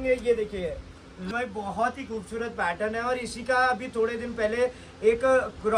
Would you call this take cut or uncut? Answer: cut